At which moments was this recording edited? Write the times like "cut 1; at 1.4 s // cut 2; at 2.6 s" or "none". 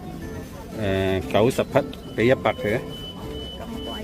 none